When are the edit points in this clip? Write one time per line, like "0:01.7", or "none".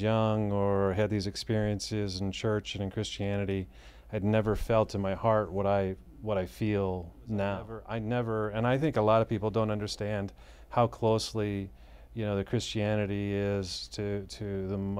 0:07.9